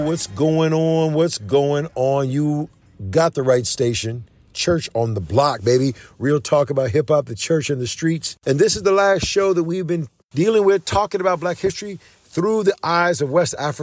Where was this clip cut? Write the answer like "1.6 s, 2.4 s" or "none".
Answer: 4.5 s, 8.3 s, 10.2 s